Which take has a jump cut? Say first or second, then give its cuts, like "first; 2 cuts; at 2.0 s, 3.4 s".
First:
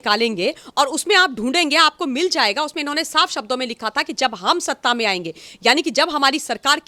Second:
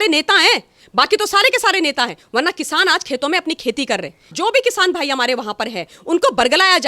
second; 1 cut; at 4.3 s